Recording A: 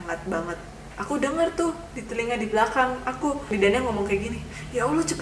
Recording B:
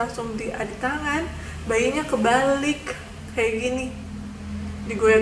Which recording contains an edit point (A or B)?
A